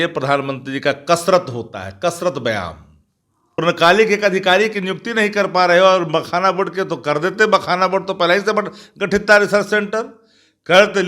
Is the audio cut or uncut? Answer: cut